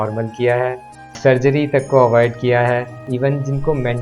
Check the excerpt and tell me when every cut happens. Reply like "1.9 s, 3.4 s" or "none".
1.0 s, 3.0 s